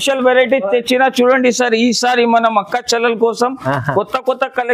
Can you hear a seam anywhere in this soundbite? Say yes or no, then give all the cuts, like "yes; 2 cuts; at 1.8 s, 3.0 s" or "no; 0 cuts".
no; 0 cuts